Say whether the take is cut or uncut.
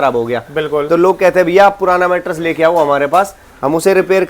uncut